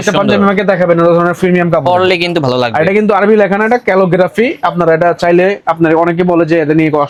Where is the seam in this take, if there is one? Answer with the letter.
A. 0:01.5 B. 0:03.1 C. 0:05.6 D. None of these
D